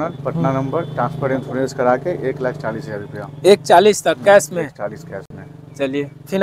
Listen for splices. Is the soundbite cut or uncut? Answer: uncut